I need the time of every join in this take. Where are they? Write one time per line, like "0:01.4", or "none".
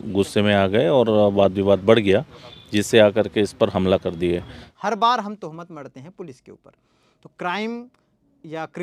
0:04.6